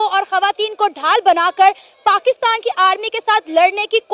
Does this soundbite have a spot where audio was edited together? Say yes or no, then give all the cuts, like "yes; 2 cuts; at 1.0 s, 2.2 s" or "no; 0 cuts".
no; 0 cuts